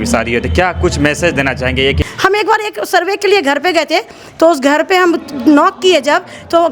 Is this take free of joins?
no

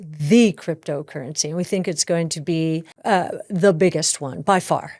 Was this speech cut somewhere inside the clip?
yes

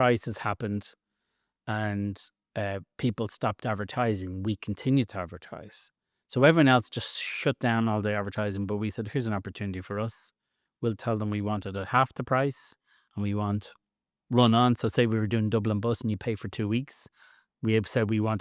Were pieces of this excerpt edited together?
no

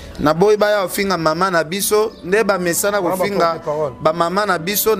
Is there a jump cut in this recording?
no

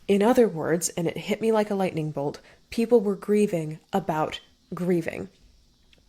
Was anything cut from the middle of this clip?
no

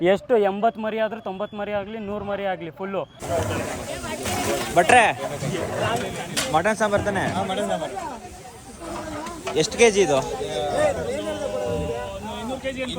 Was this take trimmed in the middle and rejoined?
yes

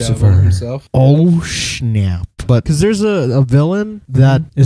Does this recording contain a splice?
yes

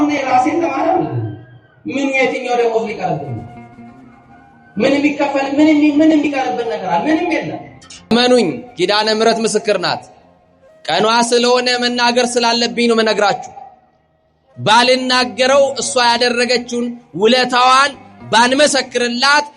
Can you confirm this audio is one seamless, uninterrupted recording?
no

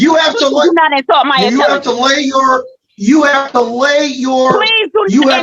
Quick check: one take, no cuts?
yes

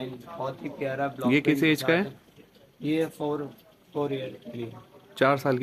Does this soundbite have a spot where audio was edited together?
no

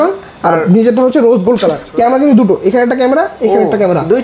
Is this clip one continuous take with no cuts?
no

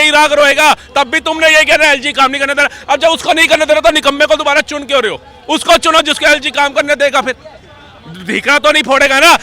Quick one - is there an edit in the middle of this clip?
no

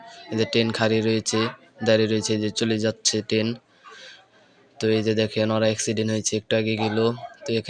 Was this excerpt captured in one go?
yes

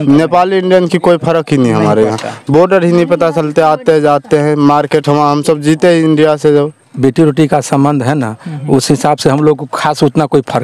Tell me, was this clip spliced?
yes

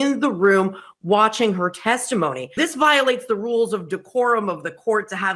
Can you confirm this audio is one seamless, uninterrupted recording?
no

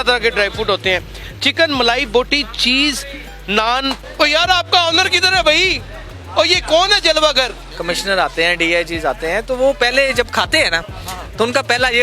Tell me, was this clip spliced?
yes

